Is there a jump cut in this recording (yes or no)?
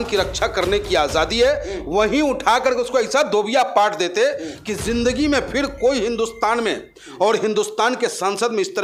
no